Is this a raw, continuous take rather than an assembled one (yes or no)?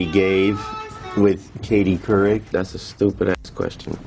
no